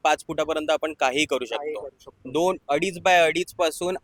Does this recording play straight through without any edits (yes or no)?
yes